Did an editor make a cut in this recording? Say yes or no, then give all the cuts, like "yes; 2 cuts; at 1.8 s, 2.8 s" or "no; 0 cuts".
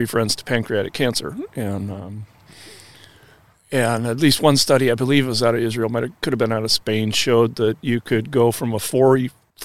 no; 0 cuts